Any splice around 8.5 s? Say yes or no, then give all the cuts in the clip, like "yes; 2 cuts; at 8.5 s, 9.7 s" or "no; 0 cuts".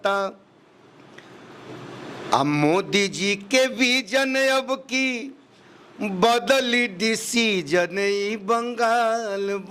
no; 0 cuts